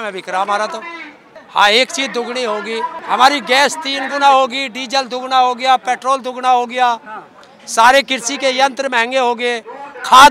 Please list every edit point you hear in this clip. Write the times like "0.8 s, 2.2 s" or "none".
1.3 s, 3.0 s